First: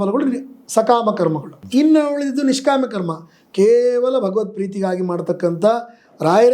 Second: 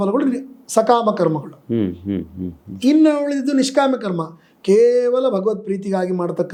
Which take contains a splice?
first; 1 cut; at 1.5 s

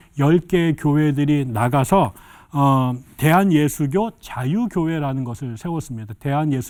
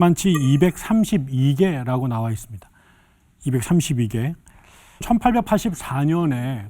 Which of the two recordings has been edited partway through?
second; 1 cut; at 5.0 s

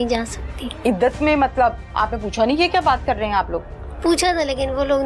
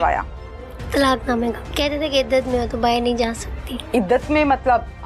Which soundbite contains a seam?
second; 1 cut; at 1.7 s

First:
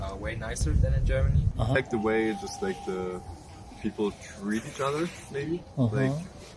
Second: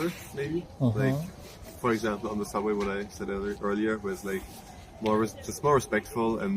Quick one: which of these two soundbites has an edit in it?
first; 1 cut; at 1.8 s

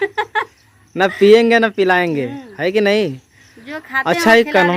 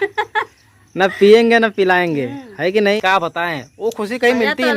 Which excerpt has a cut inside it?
second; 1 cut; at 3.0 s

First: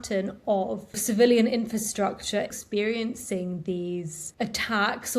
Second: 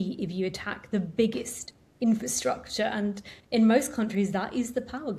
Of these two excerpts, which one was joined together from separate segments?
first; 3 cuts; at 1.0 s, 2.5 s, 4.2 s

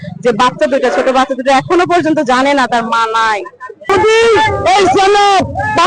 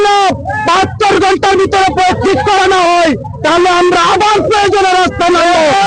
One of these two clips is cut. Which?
first; 1 cut; at 3.8 s

